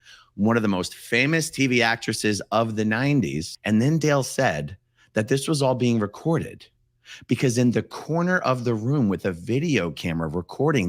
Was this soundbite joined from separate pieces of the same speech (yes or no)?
yes